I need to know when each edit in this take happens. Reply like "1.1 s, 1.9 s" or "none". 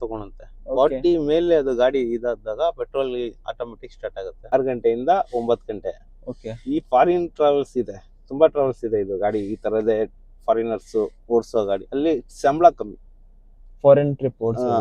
4.5 s